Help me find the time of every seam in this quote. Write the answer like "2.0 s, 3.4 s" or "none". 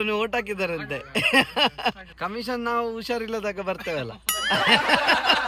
2.1 s